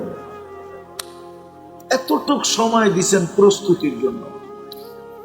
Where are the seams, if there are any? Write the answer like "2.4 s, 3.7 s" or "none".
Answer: 4.2 s